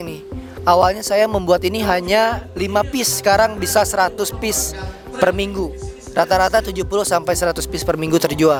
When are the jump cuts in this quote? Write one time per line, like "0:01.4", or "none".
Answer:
none